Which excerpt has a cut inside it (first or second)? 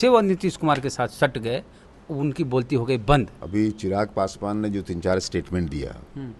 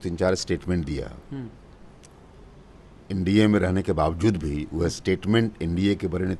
first